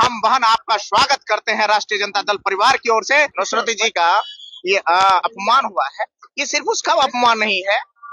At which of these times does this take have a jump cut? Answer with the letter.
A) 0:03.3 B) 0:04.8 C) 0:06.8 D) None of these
A